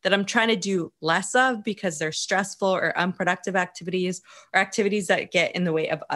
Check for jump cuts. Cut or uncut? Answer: uncut